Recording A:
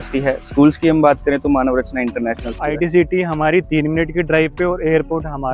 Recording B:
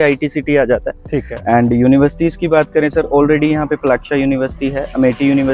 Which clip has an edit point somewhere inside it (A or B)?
A